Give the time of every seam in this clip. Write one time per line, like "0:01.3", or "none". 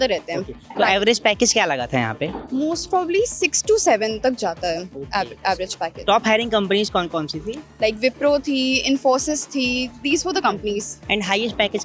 0:06.0
0:11.0